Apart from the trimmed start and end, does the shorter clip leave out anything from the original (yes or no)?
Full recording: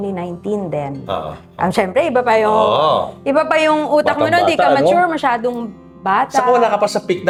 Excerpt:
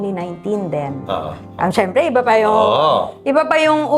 no